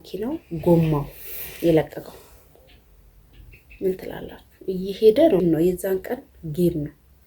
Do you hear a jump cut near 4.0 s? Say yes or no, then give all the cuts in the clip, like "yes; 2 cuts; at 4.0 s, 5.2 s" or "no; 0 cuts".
no; 1 cut; at 5.4 s